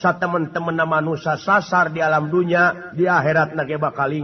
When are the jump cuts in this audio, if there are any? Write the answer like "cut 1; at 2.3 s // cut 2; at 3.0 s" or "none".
none